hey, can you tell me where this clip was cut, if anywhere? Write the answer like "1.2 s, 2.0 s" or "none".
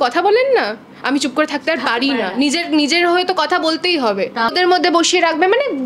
4.5 s